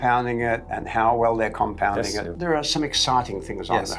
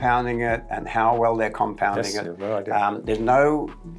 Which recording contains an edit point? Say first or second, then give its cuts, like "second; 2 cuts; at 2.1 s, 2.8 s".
first; 1 cut; at 2.3 s